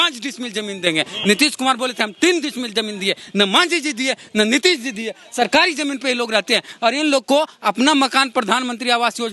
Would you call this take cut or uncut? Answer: uncut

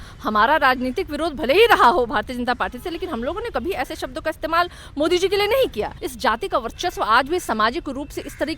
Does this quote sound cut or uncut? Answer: cut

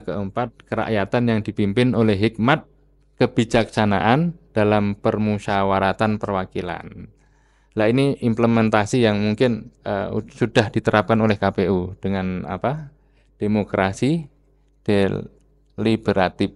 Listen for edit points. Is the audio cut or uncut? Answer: uncut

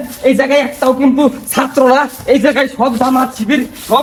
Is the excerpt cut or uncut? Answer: uncut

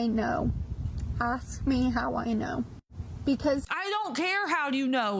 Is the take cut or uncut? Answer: uncut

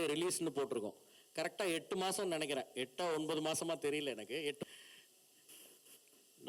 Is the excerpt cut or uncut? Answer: cut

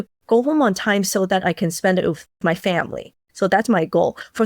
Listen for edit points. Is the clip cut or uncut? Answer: cut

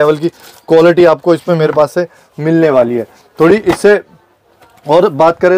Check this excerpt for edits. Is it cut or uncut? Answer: uncut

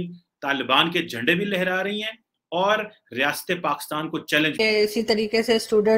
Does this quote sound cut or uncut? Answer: cut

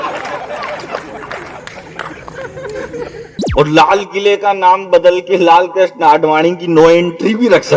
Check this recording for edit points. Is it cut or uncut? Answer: cut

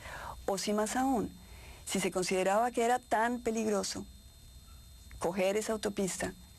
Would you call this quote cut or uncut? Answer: cut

